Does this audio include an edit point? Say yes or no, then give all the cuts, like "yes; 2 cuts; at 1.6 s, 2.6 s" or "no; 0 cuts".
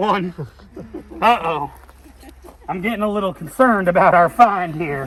no; 0 cuts